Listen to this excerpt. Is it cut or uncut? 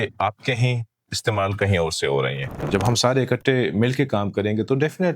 cut